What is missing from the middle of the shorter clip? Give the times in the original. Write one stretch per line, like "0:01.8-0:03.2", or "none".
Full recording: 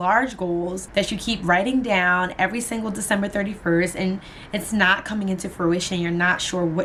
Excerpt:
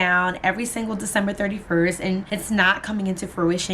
0:04.2-0:04.5